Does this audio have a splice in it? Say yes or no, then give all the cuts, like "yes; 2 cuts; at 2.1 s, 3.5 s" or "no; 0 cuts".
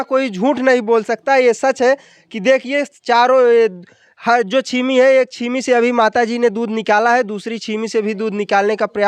no; 0 cuts